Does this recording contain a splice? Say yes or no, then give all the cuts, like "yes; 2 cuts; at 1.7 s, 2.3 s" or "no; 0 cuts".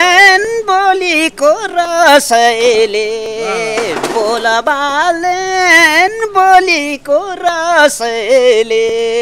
no; 0 cuts